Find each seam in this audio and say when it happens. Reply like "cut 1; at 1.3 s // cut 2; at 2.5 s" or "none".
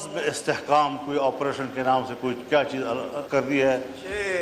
cut 1; at 3.2 s